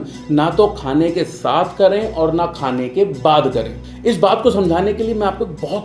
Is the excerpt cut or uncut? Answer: uncut